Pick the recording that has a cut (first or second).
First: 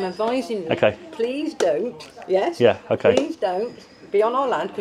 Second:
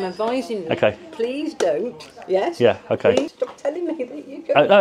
second